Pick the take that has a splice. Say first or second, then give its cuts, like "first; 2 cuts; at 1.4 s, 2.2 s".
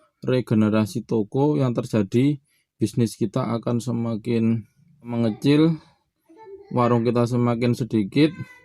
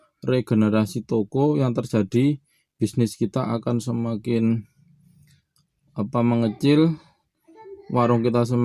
first; 1 cut; at 5.1 s